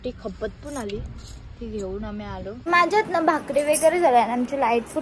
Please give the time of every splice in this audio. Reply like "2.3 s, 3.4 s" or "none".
2.6 s